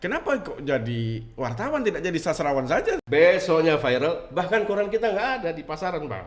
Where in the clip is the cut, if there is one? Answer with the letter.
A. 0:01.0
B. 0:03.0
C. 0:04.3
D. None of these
B